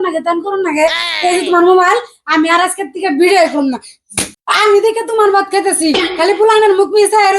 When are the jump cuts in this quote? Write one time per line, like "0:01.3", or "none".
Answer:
0:04.4